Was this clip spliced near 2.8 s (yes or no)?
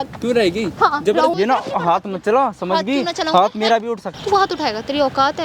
no